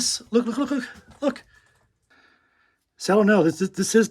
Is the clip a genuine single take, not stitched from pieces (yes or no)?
no